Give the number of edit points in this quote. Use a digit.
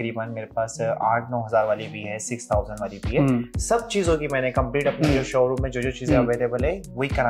1